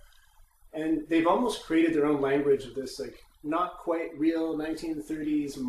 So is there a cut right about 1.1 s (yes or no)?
yes